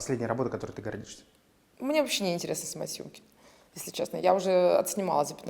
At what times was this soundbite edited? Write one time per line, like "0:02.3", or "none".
none